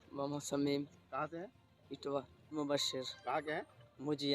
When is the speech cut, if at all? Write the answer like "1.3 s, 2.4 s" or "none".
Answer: 2.5 s